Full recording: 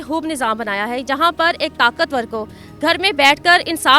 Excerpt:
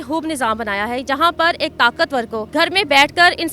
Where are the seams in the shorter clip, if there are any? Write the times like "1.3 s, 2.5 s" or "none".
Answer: 2.5 s